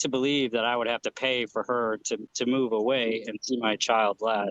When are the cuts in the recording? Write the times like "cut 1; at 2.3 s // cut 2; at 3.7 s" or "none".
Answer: cut 1; at 2.3 s